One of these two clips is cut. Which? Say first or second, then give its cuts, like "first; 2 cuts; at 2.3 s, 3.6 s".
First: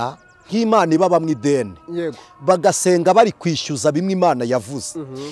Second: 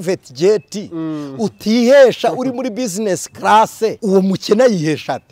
second; 1 cut; at 4.0 s